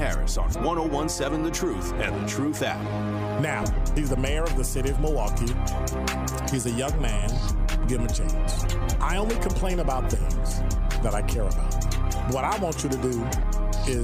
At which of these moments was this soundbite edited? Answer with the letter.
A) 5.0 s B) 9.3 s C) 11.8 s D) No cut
D